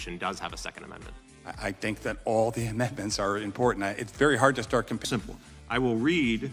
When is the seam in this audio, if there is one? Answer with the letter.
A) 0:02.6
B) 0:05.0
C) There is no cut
C